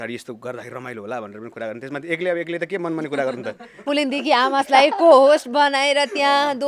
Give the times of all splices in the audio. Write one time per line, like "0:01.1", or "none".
0:03.8